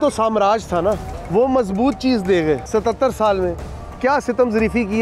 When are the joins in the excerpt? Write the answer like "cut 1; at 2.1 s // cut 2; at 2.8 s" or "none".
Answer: cut 1; at 1.1 s // cut 2; at 2.6 s